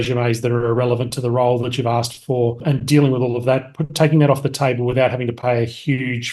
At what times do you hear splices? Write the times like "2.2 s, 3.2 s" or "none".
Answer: 2.6 s